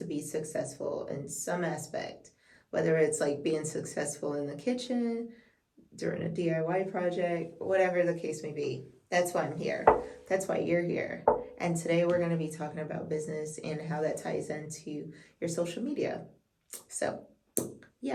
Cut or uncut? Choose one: uncut